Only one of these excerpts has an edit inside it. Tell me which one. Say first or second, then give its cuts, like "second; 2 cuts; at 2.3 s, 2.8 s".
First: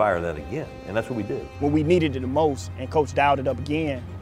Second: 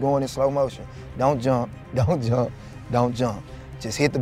first; 1 cut; at 1.5 s